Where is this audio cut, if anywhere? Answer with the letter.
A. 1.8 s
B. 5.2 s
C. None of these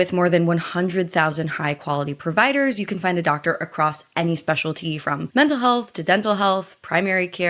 B